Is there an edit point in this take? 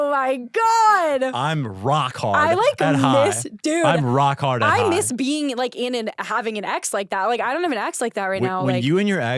no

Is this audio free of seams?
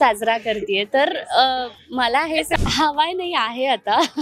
no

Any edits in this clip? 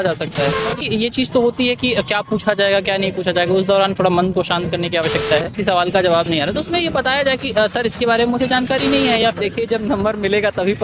yes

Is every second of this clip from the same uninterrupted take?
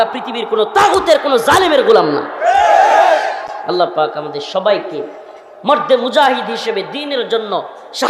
yes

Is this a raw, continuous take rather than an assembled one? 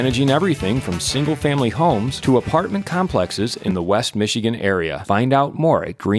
yes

